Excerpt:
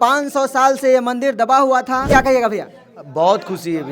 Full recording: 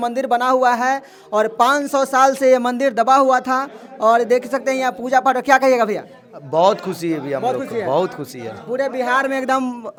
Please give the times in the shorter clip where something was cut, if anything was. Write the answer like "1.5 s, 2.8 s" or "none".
2.1 s